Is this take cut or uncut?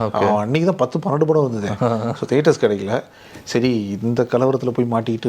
uncut